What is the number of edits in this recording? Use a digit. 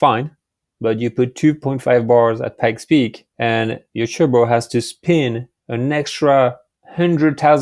1